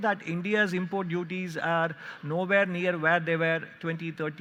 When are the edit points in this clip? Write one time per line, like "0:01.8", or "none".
none